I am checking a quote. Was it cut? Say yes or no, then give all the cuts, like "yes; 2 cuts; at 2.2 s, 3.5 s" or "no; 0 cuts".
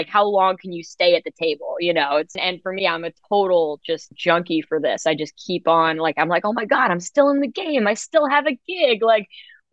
yes; 2 cuts; at 2.3 s, 4.1 s